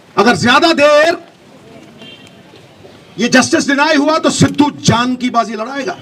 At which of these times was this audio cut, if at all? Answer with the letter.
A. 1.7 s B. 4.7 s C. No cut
C